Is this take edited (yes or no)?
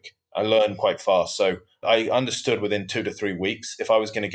yes